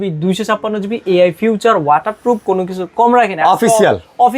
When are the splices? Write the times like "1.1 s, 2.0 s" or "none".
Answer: none